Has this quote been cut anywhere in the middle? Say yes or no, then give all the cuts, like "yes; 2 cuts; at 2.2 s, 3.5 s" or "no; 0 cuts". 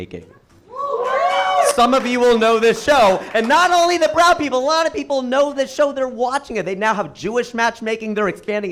no; 0 cuts